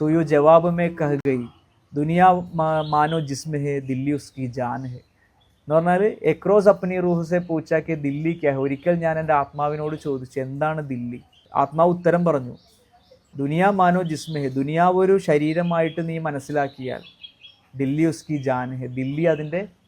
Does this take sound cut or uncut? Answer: cut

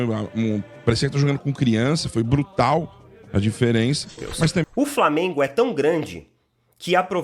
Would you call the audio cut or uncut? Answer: cut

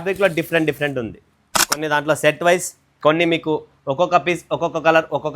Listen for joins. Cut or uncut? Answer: cut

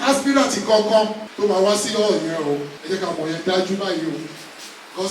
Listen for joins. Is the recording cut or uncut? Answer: cut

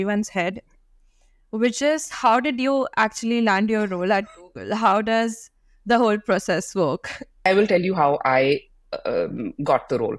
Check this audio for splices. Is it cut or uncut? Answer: cut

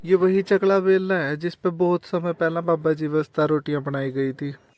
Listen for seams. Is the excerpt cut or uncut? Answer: uncut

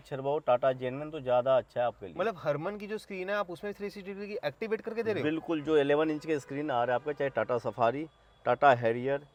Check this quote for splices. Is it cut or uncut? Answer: uncut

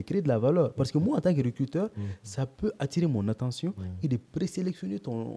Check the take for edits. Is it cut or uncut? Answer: uncut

